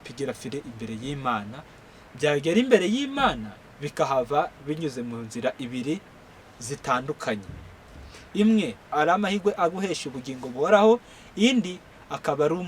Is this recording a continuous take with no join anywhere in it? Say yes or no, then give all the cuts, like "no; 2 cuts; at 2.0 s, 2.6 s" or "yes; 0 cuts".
no; 1 cut; at 8.8 s